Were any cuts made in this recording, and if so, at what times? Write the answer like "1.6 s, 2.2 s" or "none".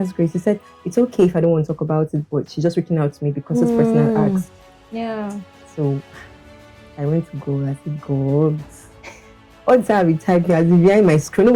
none